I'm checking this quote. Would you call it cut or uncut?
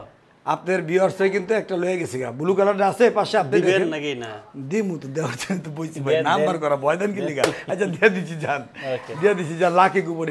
uncut